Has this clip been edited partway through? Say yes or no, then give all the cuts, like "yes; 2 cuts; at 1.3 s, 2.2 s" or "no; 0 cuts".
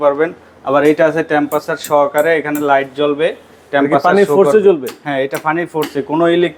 no; 0 cuts